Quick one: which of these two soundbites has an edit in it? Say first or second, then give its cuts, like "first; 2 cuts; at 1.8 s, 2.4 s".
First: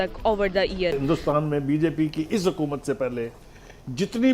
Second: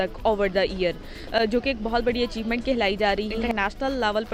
first; 1 cut; at 0.9 s